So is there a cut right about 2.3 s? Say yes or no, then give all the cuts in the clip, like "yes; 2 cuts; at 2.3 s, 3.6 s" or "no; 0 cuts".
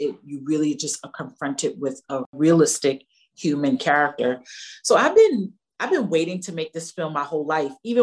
yes; 1 cut; at 2.3 s